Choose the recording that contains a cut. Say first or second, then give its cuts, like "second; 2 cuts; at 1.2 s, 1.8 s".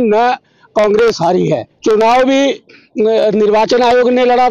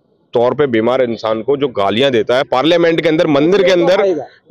first; 1 cut; at 1.7 s